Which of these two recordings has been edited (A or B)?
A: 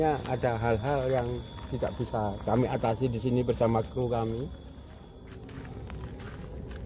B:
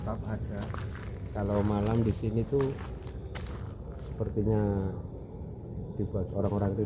A